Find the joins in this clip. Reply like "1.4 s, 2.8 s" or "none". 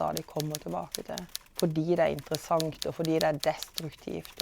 1.4 s